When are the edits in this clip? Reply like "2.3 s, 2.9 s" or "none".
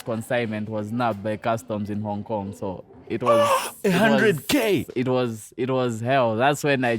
none